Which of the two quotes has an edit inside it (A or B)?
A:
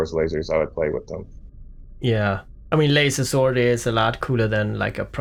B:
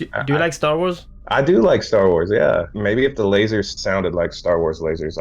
B